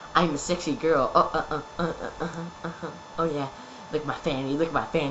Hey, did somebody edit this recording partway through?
yes; 1 cut; at 3.8 s

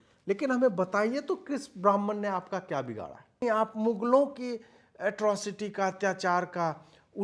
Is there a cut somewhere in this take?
yes; 1 cut; at 3.4 s

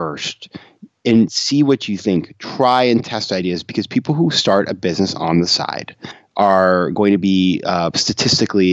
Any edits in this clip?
yes; 1 cut; at 6.2 s

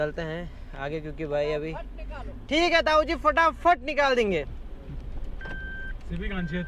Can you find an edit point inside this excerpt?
no; 0 cuts

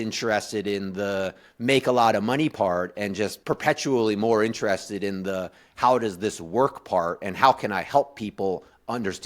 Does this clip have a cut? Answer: yes; 1 cut; at 3.4 s

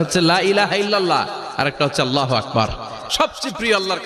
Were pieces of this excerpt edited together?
yes; 1 cut; at 3.0 s

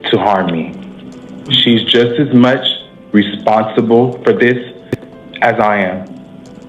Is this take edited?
yes; 1 cut; at 1.9 s

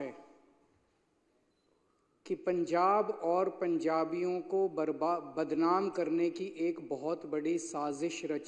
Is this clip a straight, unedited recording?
yes; 0 cuts

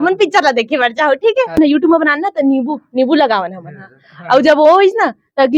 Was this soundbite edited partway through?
yes; 1 cut; at 1.6 s

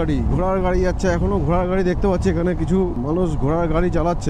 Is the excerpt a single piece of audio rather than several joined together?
no; 1 cut; at 3.0 s

